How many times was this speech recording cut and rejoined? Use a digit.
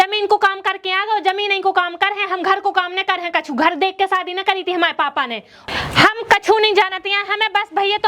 1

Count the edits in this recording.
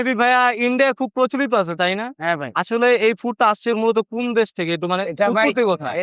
0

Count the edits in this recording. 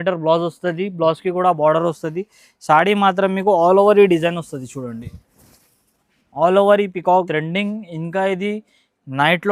1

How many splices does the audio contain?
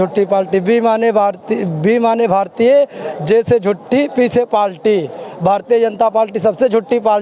0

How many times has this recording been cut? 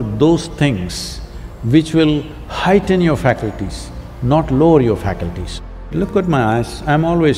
1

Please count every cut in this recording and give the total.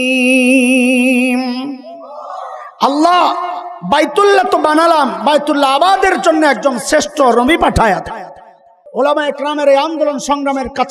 1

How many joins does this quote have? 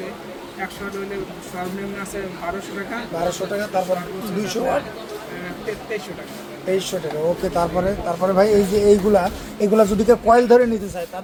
0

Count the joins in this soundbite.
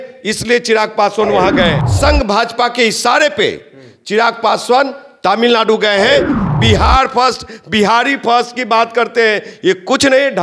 2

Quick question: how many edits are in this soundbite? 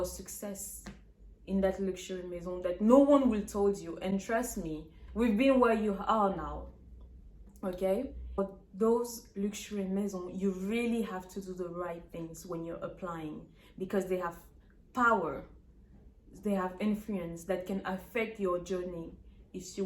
0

